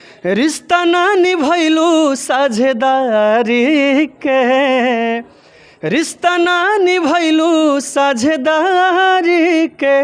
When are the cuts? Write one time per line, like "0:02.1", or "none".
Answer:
none